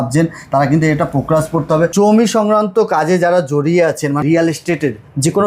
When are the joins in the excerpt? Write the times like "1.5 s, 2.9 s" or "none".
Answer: 1.9 s, 4.2 s